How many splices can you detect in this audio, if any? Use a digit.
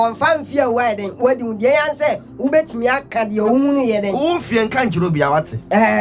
0